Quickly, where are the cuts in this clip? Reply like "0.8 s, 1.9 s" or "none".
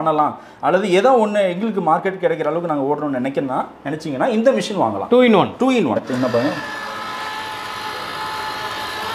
6.1 s